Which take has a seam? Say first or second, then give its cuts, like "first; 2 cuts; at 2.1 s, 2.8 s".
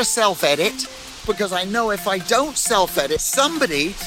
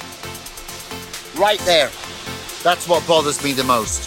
first; 2 cuts; at 1.2 s, 3.3 s